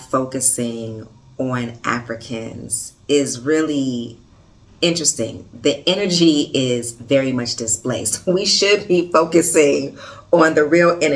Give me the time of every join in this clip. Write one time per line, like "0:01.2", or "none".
none